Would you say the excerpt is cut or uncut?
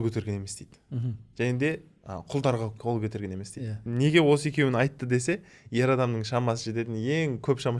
cut